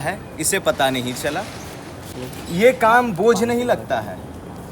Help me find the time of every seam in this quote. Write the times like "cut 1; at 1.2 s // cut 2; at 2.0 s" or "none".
cut 1; at 2.1 s